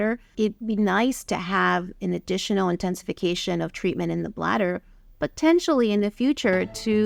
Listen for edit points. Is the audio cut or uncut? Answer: uncut